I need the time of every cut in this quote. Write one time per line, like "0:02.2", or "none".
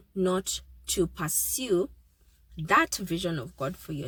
none